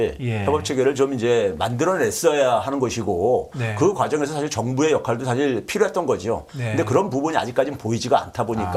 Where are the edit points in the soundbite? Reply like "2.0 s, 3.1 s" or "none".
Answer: none